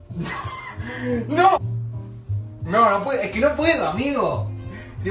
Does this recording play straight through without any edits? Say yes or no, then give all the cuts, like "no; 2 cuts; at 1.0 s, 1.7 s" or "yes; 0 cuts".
yes; 0 cuts